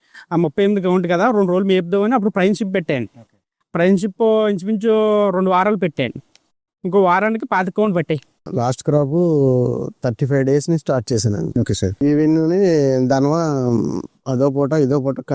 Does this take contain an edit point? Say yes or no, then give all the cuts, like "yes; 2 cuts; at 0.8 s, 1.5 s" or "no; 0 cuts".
yes; 2 cuts; at 8.4 s, 12.0 s